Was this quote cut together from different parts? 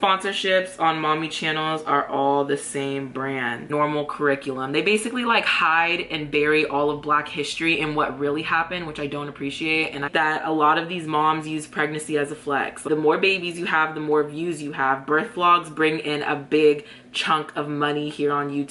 yes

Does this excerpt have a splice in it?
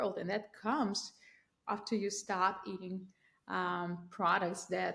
no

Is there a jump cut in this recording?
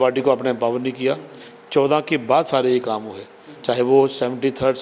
no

